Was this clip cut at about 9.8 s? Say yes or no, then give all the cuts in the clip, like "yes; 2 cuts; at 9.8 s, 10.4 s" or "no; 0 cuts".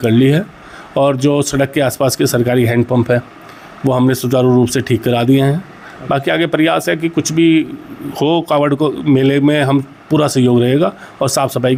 no; 0 cuts